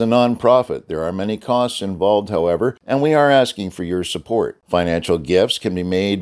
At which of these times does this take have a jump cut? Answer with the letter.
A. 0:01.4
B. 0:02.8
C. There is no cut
B